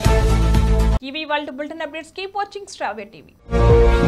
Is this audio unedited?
yes; 0 cuts

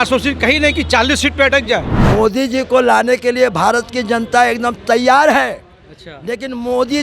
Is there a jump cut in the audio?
yes; 1 cut; at 1.9 s

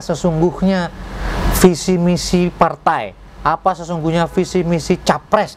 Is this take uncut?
yes; 0 cuts

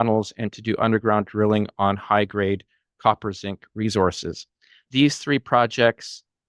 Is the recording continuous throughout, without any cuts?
no; 1 cut; at 4.8 s

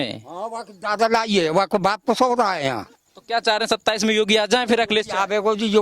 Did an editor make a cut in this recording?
yes; 1 cut; at 3.0 s

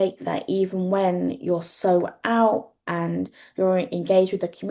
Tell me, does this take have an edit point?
no; 0 cuts

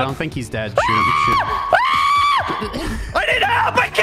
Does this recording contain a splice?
no; 0 cuts

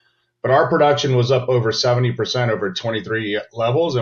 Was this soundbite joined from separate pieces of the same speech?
no; 0 cuts

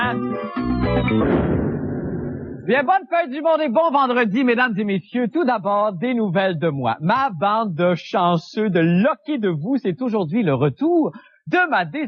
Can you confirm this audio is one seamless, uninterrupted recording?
no; 1 cut; at 7.2 s

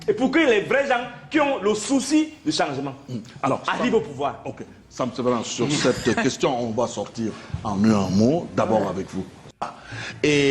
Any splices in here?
no; 0 cuts

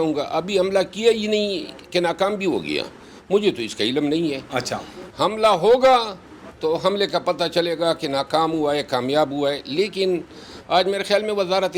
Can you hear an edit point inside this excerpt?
no; 0 cuts

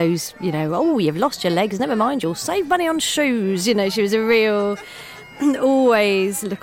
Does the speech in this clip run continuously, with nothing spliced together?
yes; 0 cuts

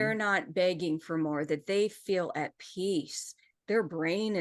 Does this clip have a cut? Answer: no; 0 cuts

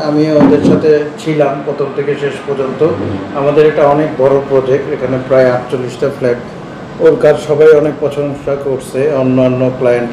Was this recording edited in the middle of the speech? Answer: no; 0 cuts

